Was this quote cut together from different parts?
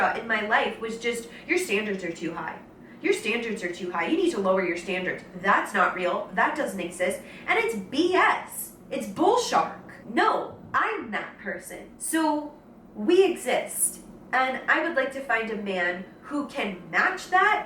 no; 0 cuts

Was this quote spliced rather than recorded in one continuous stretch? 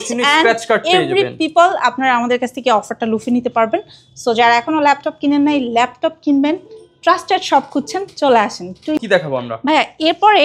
no; 0 cuts

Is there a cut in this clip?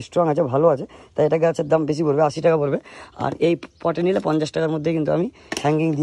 no; 0 cuts

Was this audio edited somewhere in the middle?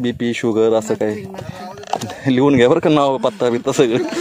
no; 0 cuts

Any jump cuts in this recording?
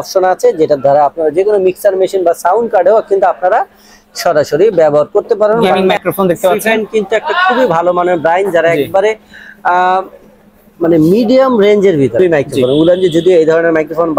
yes; 2 cuts; at 5.7 s, 12.1 s

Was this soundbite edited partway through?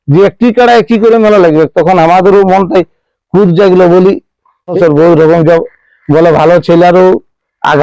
yes; 1 cut; at 4.7 s

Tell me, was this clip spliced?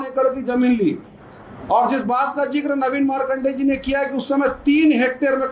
no; 0 cuts

